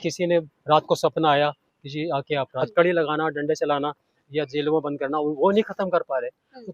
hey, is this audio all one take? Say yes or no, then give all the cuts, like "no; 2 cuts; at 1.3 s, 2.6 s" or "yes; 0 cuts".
no; 1 cut; at 2.5 s